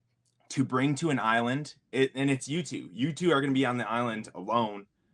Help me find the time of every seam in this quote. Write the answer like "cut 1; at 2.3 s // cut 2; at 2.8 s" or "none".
none